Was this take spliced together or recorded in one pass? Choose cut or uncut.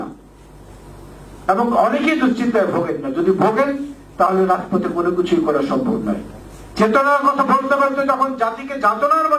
uncut